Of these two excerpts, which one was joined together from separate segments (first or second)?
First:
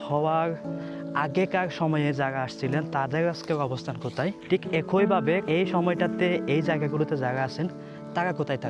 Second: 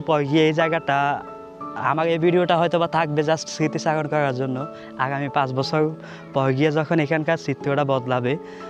first